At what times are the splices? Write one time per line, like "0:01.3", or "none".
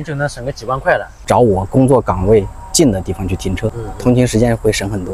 0:01.2
0:03.9